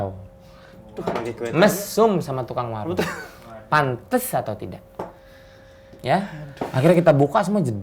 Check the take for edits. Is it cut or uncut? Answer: uncut